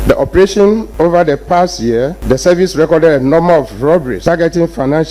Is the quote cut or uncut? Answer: cut